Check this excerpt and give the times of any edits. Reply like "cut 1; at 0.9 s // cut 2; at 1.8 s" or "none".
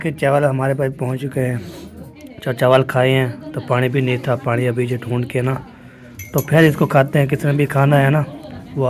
none